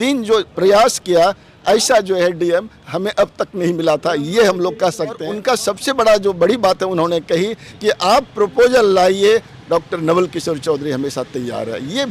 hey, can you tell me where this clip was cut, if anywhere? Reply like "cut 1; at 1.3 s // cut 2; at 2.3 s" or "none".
cut 1; at 5.3 s